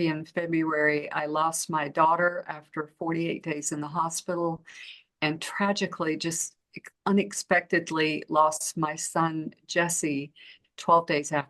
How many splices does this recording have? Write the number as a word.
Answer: zero